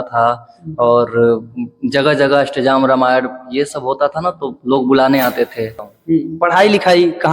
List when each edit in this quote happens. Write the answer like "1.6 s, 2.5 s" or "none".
5.8 s